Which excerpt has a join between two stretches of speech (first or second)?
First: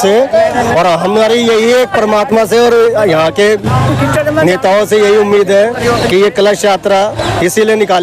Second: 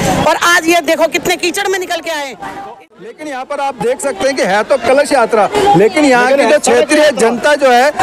second